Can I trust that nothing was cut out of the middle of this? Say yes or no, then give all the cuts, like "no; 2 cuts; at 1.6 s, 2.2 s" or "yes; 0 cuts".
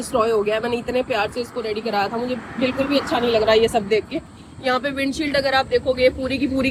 yes; 0 cuts